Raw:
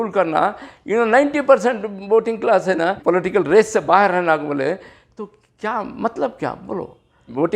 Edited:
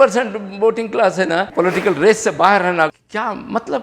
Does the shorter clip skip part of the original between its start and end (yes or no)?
yes